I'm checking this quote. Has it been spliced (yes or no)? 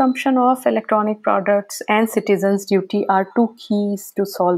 no